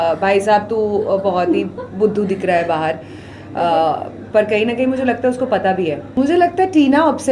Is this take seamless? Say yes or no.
no